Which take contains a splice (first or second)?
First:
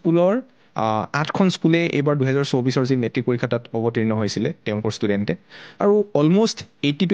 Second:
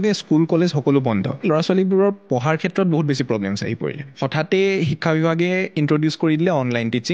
second